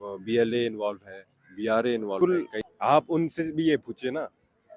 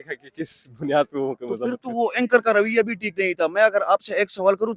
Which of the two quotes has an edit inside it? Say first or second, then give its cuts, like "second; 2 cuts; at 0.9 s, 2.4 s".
first; 1 cut; at 2.2 s